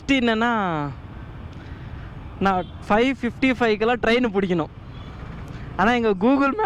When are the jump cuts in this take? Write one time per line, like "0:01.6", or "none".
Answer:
none